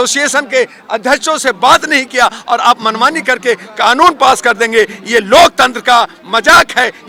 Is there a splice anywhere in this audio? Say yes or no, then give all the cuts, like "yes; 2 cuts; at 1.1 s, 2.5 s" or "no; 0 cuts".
no; 0 cuts